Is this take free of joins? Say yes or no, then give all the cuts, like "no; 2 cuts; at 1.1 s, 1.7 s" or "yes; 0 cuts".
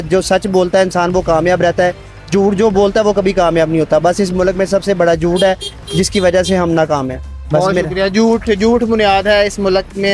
yes; 0 cuts